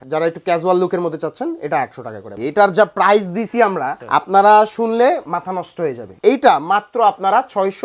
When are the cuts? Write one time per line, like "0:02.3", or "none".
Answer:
0:02.2
0:04.0
0:06.1